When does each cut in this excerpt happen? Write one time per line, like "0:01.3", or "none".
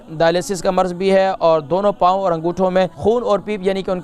0:02.9